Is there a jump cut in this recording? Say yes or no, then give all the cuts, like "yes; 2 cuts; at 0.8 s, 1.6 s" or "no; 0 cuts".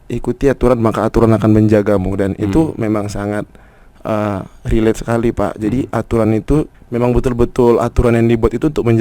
yes; 1 cut; at 6.8 s